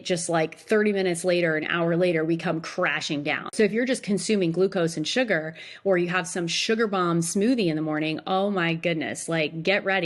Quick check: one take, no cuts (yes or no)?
no